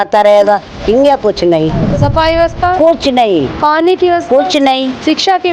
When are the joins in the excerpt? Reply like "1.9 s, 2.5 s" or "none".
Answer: 1.9 s